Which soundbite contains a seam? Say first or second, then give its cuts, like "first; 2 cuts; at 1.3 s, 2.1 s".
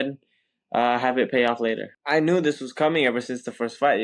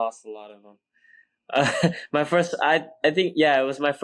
first; 1 cut; at 1.9 s